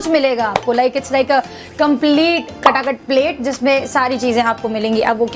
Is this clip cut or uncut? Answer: uncut